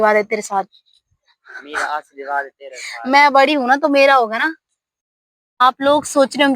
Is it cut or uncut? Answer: cut